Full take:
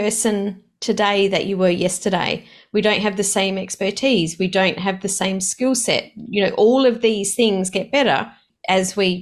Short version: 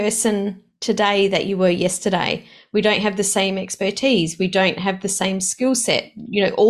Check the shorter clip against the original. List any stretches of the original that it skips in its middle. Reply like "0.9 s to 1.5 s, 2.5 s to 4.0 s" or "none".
none